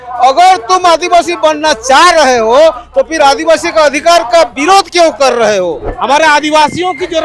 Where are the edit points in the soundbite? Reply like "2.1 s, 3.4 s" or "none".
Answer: 5.9 s